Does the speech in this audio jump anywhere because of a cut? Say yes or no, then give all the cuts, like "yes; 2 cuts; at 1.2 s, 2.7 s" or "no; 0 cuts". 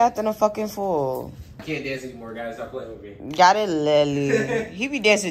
yes; 1 cut; at 1.5 s